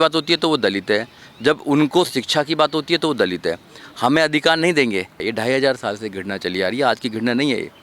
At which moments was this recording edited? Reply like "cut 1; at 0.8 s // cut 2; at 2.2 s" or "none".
cut 1; at 5.3 s